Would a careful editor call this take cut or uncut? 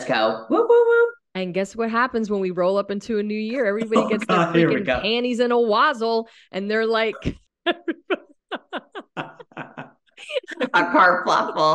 cut